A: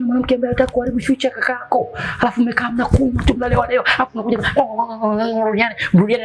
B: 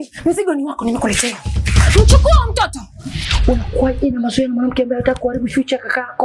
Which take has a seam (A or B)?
B